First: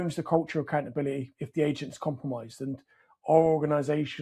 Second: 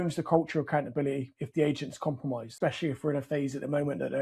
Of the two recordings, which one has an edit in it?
second; 1 cut; at 2.4 s

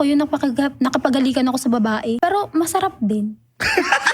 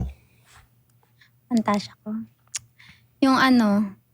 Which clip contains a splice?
first; 1 cut; at 2.2 s

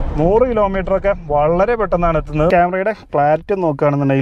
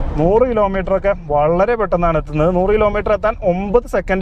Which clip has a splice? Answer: first; 1 cut; at 2.5 s

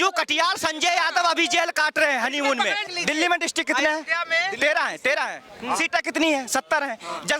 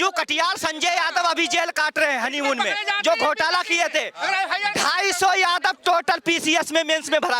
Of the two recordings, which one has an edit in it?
first; 1 cut; at 2.9 s

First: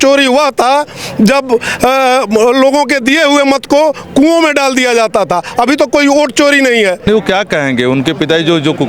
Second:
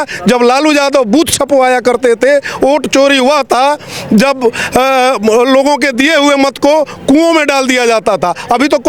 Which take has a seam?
first; 1 cut; at 7.0 s

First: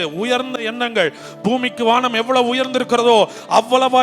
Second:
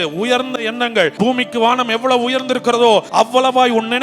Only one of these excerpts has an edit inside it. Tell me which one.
second; 2 cuts; at 1.1 s, 3.1 s

